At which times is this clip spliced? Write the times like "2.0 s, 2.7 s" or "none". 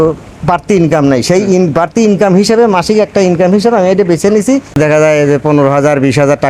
4.7 s